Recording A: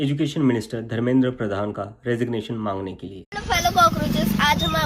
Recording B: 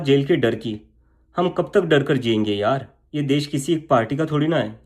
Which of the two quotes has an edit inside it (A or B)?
A